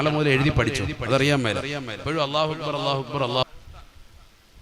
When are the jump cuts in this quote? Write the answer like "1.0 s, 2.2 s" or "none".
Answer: 3.4 s